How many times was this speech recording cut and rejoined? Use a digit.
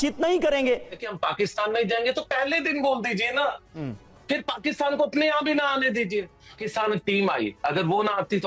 2